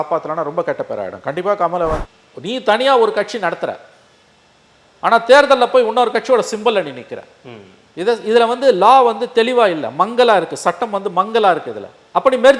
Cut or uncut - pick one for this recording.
cut